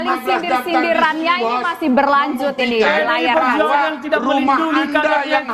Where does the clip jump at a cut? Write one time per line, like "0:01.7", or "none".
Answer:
none